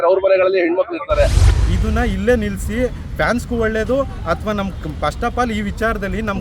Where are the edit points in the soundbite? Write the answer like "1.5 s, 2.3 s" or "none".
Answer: 1.5 s